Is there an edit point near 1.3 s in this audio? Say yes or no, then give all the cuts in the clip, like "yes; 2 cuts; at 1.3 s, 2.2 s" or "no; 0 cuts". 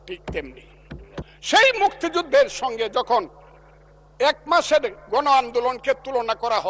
yes; 1 cut; at 1.3 s